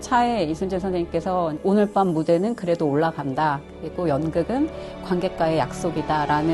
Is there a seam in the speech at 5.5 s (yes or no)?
no